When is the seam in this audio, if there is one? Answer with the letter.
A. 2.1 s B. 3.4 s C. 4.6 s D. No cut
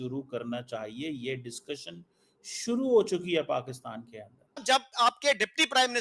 C